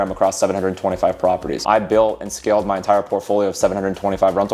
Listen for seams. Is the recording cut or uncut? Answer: cut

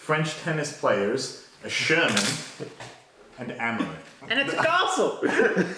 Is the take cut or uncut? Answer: uncut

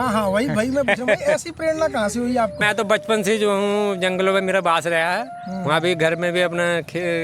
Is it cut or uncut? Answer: cut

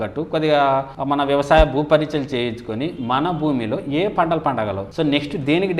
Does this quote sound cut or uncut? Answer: cut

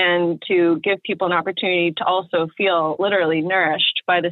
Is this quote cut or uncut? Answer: uncut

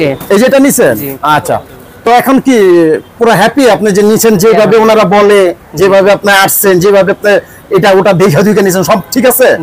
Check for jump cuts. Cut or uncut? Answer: uncut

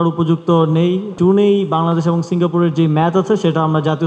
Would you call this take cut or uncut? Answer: cut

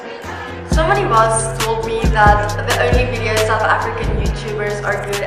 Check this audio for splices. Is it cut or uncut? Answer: uncut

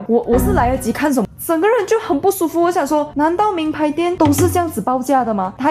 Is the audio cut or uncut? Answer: cut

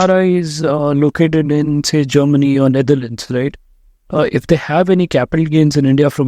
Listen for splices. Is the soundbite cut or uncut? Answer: uncut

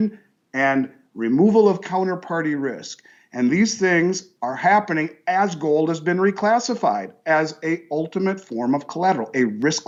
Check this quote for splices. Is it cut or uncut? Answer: uncut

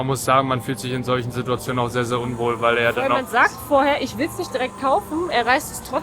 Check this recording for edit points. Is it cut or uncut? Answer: uncut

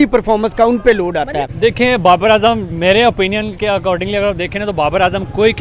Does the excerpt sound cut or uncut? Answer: cut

